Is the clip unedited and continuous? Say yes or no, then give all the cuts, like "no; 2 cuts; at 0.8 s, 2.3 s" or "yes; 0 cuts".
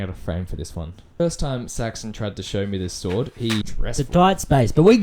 no; 2 cuts; at 1.2 s, 3.7 s